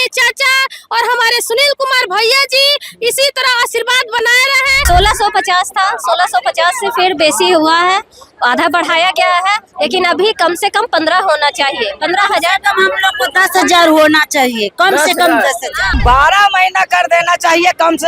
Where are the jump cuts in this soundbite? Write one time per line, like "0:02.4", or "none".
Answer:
0:04.8
0:16.0